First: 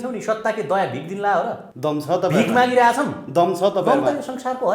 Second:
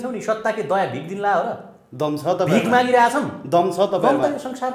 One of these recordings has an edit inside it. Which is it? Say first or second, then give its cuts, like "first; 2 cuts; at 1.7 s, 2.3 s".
first; 1 cut; at 1.6 s